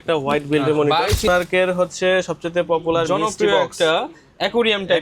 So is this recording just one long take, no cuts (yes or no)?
no